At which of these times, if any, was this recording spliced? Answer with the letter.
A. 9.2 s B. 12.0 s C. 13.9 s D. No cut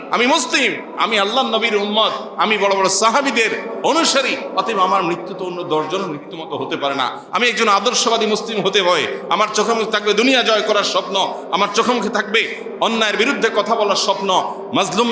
A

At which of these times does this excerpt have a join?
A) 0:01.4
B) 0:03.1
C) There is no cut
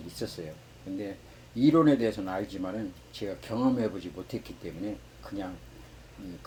C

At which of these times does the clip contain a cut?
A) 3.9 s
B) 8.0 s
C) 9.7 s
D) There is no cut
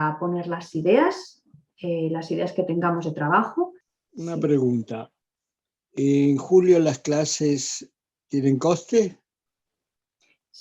A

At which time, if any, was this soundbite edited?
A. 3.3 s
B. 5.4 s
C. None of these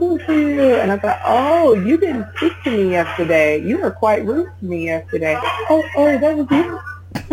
B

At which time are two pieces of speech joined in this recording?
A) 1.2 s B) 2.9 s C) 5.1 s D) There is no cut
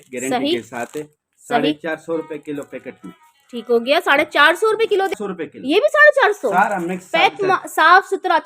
C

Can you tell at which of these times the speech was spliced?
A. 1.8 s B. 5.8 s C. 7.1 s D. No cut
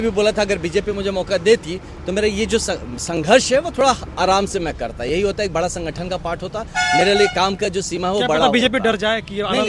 D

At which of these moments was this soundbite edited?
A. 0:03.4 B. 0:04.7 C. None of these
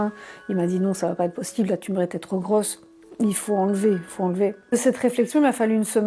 B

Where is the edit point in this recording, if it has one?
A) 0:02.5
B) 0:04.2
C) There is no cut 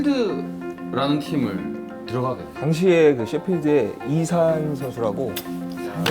A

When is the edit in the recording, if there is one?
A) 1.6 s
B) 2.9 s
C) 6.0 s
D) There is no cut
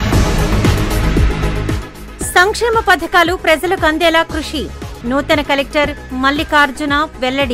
A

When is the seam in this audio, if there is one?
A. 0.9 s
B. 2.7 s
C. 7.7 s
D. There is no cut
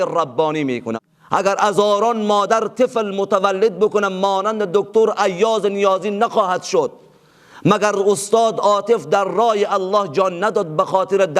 A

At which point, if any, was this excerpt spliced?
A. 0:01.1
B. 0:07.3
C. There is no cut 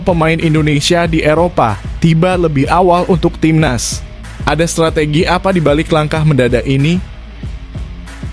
B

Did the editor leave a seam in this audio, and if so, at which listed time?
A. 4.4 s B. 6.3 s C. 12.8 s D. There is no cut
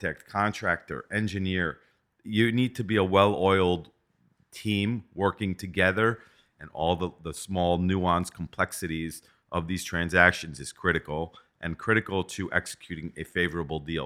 B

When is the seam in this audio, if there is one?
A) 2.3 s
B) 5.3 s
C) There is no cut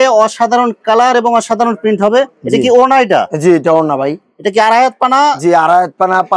C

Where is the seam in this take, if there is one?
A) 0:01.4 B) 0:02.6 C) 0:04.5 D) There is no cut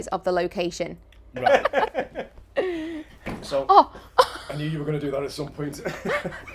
A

